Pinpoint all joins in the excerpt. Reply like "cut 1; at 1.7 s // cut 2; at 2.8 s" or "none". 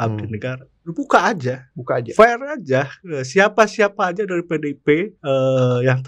cut 1; at 1.7 s // cut 2; at 5.1 s